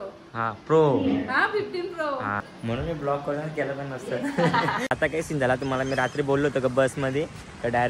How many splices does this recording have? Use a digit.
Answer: 2